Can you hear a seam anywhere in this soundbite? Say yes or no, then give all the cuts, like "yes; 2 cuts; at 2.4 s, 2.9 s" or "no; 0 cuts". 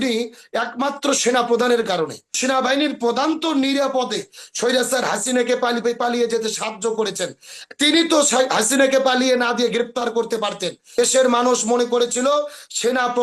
yes; 2 cuts; at 2.3 s, 11.0 s